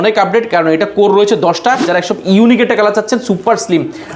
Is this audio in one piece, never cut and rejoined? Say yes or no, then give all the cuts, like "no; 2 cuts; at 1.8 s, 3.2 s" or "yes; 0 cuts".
no; 1 cut; at 1.9 s